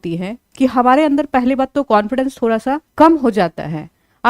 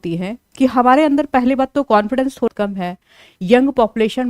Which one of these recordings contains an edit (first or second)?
second